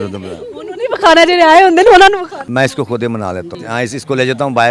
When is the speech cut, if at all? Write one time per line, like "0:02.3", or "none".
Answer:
0:02.4
0:03.5